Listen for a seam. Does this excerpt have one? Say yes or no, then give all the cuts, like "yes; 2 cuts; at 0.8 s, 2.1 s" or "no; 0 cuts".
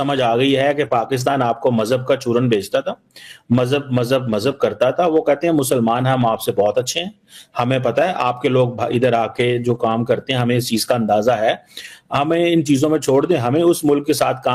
no; 0 cuts